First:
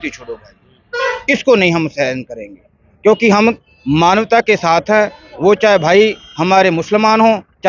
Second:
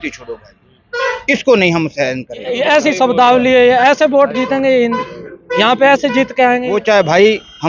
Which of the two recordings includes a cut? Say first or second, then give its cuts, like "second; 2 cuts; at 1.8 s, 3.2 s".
second; 2 cuts; at 2.5 s, 6.7 s